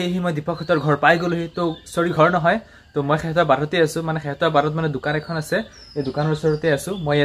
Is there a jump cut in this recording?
no; 0 cuts

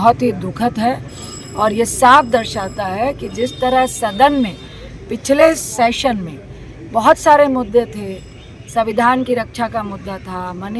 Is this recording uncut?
yes; 0 cuts

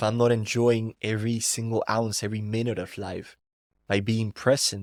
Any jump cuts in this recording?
no; 0 cuts

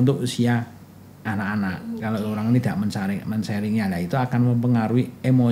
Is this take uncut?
yes; 0 cuts

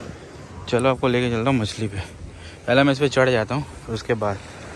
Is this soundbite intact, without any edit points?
yes; 0 cuts

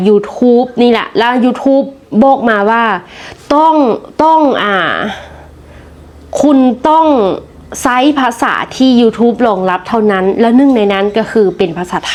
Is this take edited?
no; 0 cuts

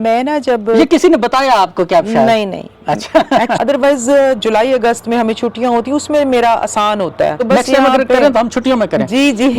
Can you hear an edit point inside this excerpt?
yes; 2 cuts; at 3.6 s, 7.4 s

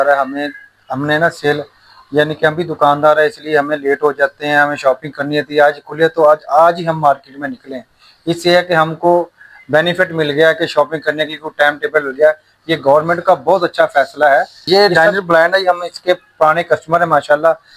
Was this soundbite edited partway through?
yes; 1 cut; at 14.6 s

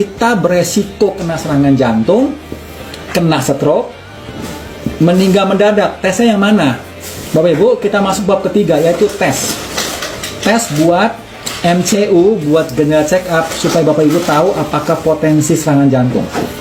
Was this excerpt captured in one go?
yes; 0 cuts

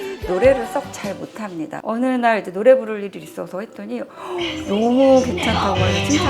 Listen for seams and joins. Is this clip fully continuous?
no; 1 cut; at 1.8 s

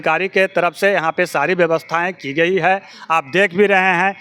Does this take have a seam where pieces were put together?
no; 0 cuts

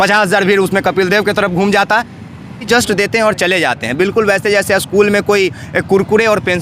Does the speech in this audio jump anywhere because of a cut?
yes; 1 cut; at 2.7 s

